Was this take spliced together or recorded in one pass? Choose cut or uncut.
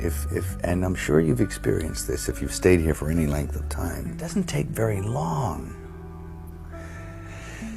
cut